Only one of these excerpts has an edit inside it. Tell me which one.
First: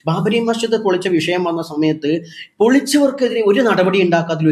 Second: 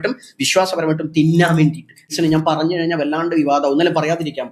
second; 1 cut; at 2.1 s

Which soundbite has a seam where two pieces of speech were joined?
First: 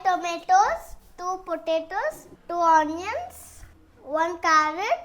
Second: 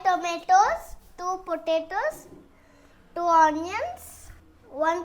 first; 1 cut; at 2.3 s

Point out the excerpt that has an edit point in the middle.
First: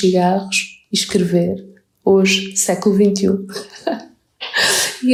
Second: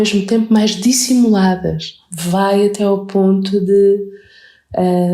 second; 1 cut; at 2.0 s

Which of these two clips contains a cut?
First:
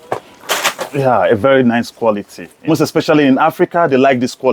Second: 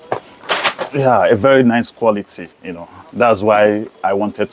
first; 1 cut; at 2.7 s

